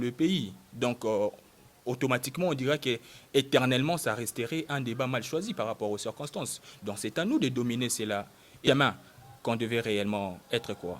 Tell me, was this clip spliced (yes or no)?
yes